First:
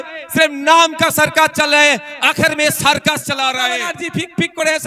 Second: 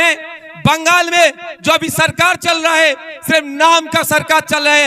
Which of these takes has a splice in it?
first; 1 cut; at 3.9 s

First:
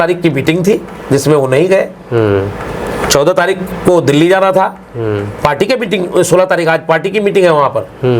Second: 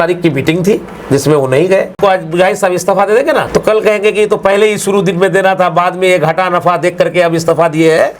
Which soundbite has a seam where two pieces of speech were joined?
second; 2 cuts; at 2.0 s, 3.5 s

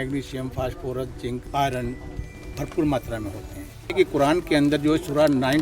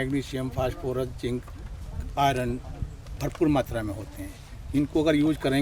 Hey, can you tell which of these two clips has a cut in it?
first; 2 cuts; at 1.5 s, 3.9 s

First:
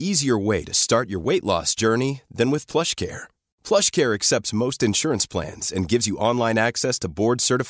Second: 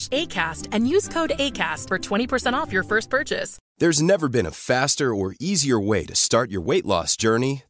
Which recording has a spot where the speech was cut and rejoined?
second; 1 cut; at 3.6 s

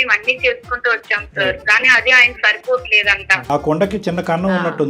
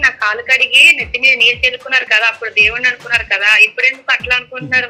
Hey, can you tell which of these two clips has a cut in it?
first; 1 cut; at 3.5 s

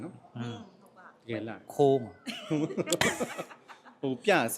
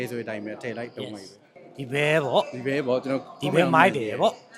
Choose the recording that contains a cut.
second; 1 cut; at 1.6 s

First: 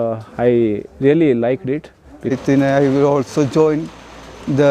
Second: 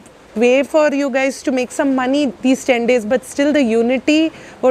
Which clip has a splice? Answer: first; 1 cut; at 2.3 s

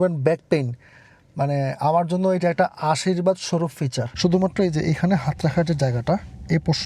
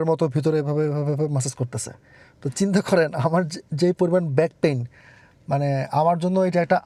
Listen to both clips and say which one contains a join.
first; 1 cut; at 4.1 s

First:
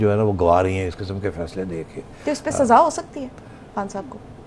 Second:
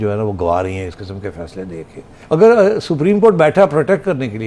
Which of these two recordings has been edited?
second; 1 cut; at 2.1 s

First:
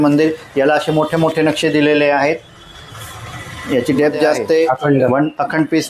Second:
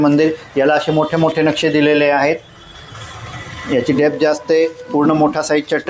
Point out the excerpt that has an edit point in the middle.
first; 1 cut; at 4.7 s

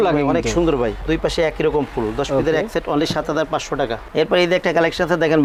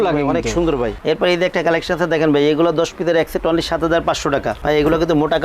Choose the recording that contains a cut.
second; 1 cut; at 1.0 s

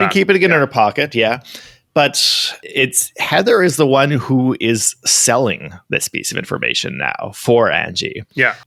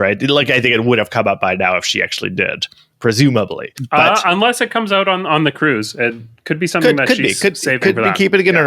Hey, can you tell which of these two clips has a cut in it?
second; 1 cut; at 3.8 s

